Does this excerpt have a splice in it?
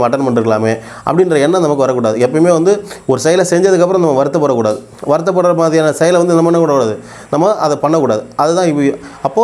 no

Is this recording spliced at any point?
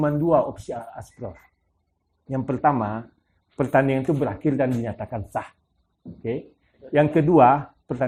no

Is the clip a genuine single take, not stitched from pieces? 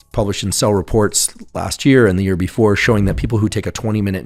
yes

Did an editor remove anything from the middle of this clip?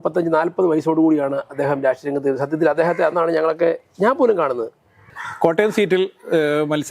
yes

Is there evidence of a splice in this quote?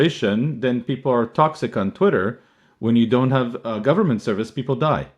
no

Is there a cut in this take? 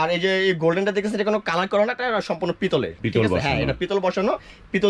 no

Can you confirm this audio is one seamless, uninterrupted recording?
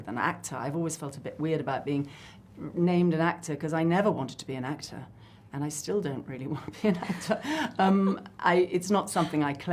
yes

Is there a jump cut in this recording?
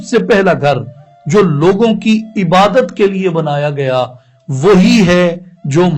no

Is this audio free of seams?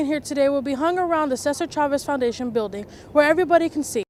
yes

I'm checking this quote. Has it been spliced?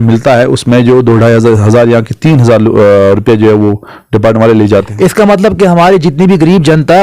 no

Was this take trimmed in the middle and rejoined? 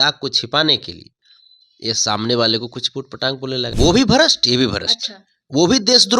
yes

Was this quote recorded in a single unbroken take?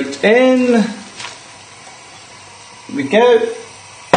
no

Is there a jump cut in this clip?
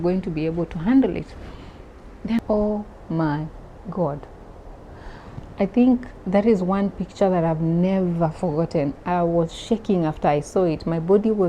yes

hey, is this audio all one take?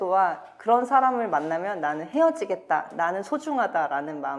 yes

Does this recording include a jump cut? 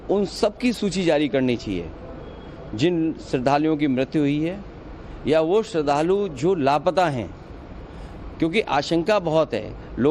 no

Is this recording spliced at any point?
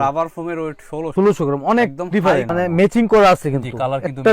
yes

